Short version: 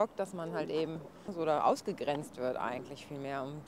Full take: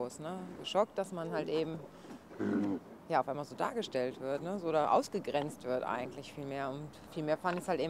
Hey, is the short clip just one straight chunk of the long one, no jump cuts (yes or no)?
no